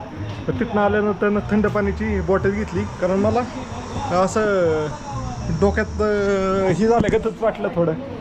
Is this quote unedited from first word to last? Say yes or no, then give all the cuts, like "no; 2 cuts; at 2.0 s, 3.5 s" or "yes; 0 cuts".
yes; 0 cuts